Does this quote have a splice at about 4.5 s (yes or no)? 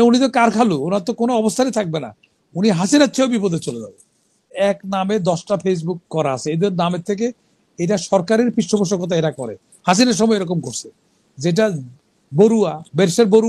yes